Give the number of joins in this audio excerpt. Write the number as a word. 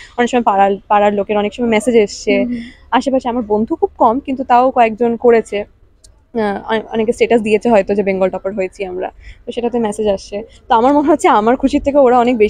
zero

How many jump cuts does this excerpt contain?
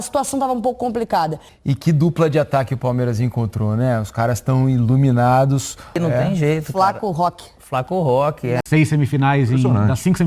three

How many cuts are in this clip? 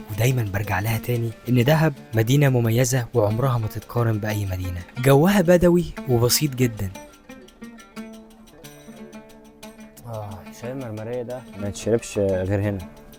zero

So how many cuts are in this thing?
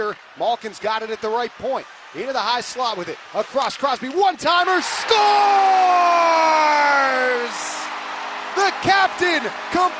zero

